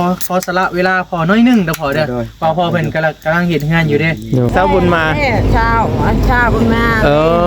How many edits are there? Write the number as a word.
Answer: one